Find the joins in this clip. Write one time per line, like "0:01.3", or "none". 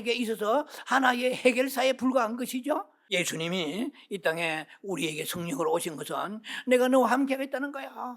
0:03.1